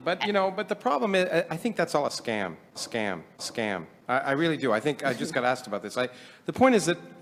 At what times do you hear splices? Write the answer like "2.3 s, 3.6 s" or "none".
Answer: none